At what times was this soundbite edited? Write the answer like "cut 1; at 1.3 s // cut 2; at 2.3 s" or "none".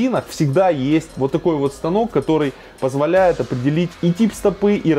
cut 1; at 1.1 s // cut 2; at 3.9 s

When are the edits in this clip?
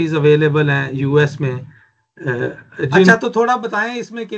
cut 1; at 3.1 s

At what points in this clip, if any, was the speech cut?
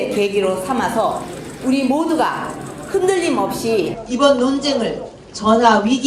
cut 1; at 1.3 s

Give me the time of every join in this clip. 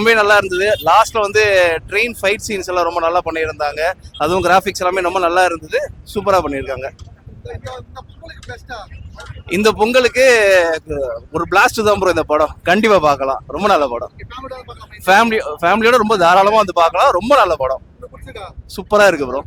none

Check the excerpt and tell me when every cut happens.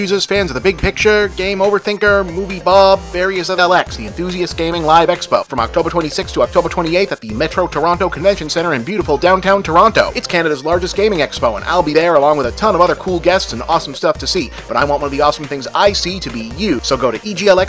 cut 1; at 3.6 s

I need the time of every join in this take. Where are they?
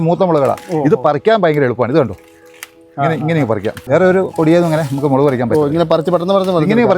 cut 1; at 3.8 s

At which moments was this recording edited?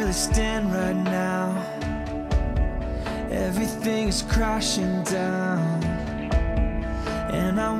none

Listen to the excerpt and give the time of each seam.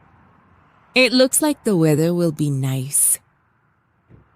cut 1; at 0.9 s

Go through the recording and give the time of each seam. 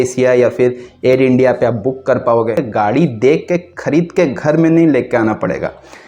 cut 1; at 2.6 s

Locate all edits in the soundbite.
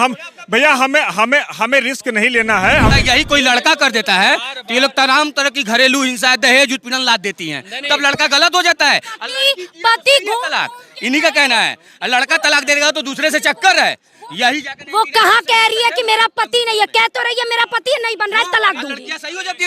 cut 1; at 2.9 s

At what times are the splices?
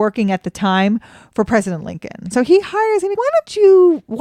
cut 1; at 2.2 s // cut 2; at 3.1 s

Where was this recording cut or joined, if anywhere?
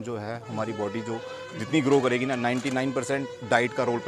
none

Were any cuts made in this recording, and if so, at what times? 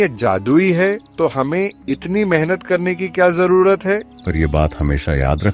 cut 1; at 1.1 s // cut 2; at 4.1 s

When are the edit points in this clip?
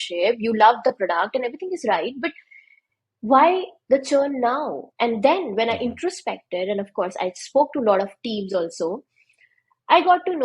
none

